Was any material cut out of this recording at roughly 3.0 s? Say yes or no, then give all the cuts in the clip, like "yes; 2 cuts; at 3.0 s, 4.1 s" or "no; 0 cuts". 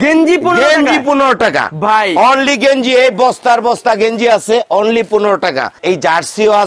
no; 1 cut; at 5.7 s